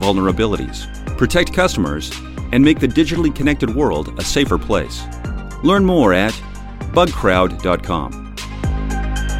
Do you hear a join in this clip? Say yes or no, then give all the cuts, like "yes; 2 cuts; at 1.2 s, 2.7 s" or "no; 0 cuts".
yes; 1 cut; at 8.3 s